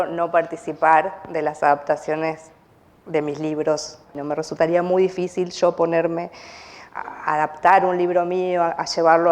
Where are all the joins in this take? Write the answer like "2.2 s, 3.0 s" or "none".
4.2 s